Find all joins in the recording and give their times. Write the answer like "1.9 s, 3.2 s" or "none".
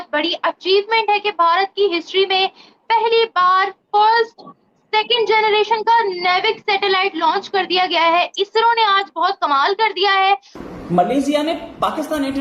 10.5 s